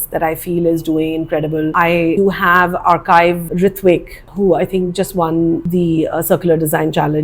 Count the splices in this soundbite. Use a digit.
1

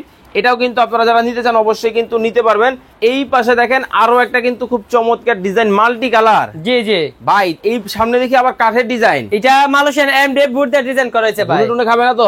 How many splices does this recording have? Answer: 1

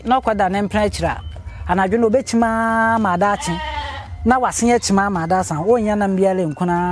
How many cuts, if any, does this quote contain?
0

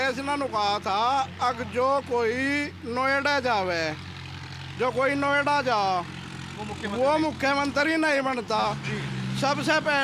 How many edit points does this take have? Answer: 0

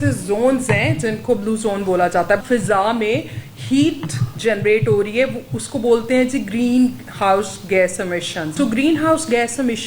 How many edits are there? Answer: 2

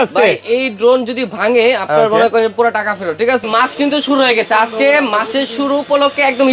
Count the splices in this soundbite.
1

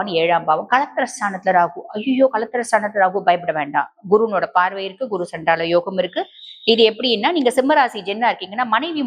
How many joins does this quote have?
0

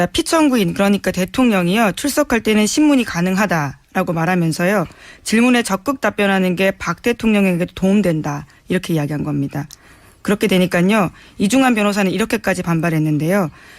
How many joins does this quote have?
1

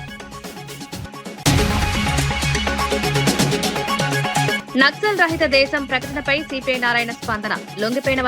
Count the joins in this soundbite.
2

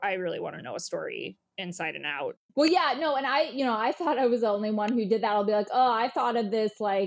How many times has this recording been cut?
1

